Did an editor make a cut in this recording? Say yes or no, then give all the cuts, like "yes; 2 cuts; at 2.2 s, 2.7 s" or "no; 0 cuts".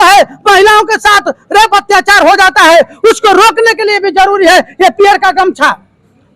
no; 0 cuts